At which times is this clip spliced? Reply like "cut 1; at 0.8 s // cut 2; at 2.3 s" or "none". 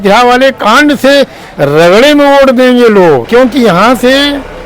cut 1; at 3.2 s